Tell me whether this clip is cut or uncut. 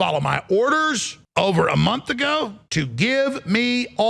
cut